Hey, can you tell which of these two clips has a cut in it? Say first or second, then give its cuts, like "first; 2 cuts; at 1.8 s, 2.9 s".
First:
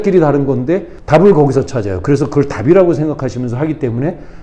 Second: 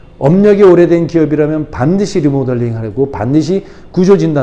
first; 1 cut; at 0.9 s